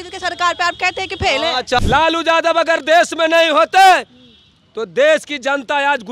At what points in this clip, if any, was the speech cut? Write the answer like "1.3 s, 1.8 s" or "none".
1.8 s